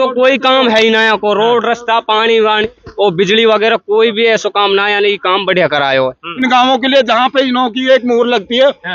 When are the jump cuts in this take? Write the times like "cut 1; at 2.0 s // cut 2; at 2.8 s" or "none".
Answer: cut 1; at 6.3 s